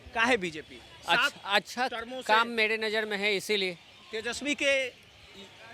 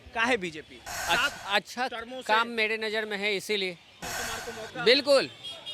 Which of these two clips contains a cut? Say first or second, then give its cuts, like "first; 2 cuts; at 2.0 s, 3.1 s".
second; 1 cut; at 4.1 s